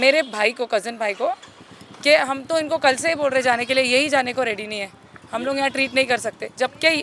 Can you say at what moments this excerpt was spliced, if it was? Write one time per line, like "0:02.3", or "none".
none